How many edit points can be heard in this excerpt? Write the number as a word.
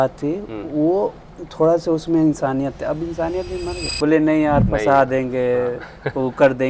one